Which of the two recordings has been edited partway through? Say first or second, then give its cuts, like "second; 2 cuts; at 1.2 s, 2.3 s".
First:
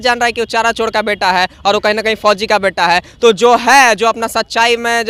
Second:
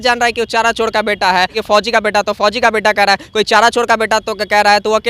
second; 1 cut; at 1.6 s